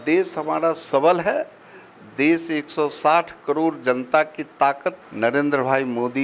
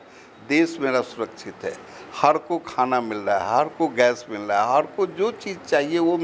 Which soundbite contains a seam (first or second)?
first